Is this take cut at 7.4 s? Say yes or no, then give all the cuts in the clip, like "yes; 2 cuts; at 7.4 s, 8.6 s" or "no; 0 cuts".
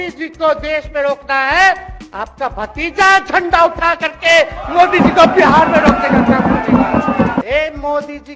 yes; 1 cut; at 7.4 s